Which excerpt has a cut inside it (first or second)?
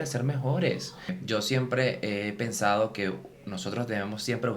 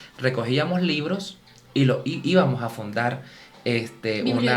first